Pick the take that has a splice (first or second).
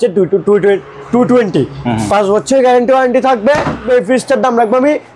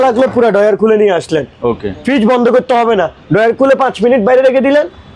first